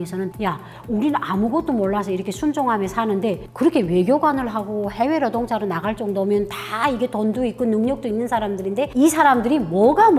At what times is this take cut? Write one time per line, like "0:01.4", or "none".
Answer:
none